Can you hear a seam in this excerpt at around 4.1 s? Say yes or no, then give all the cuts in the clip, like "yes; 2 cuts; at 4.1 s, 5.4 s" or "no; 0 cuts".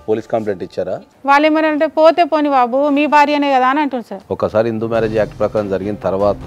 yes; 2 cuts; at 0.9 s, 4.1 s